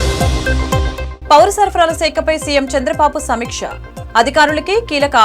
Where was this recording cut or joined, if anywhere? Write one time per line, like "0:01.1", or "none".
none